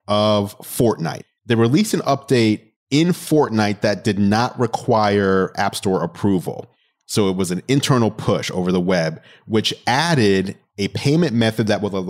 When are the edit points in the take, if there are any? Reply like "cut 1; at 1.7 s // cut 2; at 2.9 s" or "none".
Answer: cut 1; at 1.1 s // cut 2; at 2.7 s

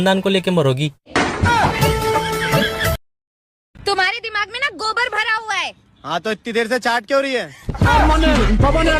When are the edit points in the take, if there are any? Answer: cut 1; at 3.1 s

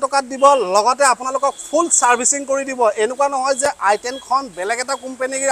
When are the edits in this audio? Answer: none

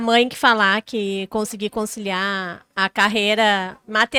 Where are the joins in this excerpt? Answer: none

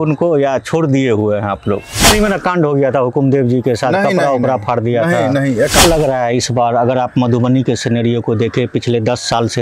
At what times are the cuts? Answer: cut 1; at 2.0 s // cut 2; at 5.8 s

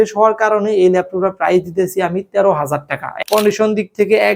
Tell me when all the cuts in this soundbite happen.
cut 1; at 3.1 s

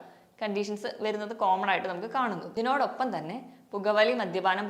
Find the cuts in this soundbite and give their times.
cut 1; at 2.4 s

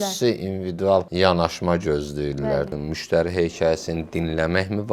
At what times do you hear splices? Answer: cut 1; at 1.1 s // cut 2; at 2.7 s

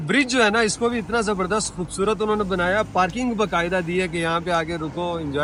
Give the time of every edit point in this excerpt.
none

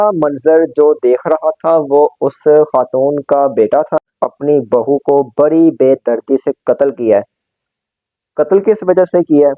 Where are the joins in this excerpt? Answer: cut 1; at 4.1 s

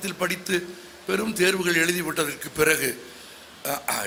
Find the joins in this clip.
none

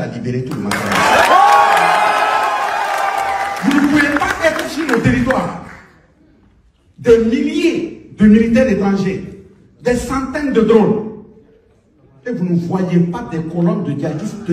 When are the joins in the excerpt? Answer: cut 1; at 3.5 s

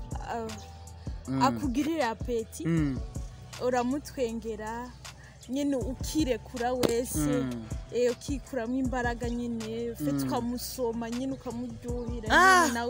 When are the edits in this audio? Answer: none

